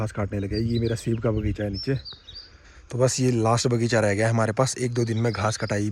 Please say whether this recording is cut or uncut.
uncut